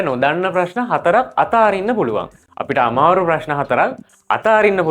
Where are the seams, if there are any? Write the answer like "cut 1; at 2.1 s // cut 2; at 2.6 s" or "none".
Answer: none

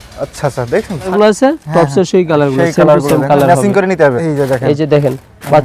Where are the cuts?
cut 1; at 1.1 s // cut 2; at 4.2 s

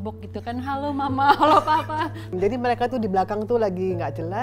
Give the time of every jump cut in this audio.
cut 1; at 2.2 s

